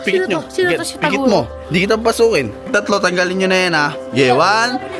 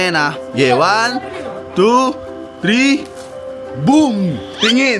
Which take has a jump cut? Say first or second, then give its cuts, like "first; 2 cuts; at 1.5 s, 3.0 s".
first; 1 cut; at 2.7 s